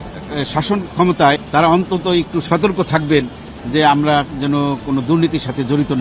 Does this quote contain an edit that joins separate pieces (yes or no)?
yes